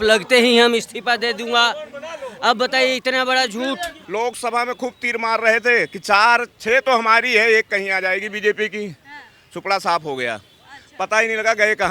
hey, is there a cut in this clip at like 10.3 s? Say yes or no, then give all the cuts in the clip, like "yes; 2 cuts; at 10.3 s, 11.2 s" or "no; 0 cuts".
no; 1 cut; at 3.9 s